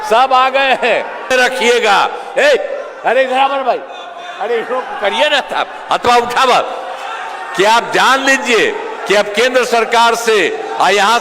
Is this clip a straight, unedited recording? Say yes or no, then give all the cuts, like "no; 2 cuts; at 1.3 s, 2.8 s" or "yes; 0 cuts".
no; 1 cut; at 1.3 s